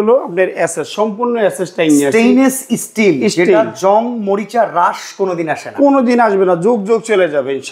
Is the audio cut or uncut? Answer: uncut